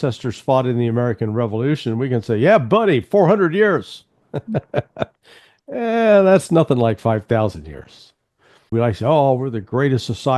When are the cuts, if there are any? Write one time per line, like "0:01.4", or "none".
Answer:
0:08.7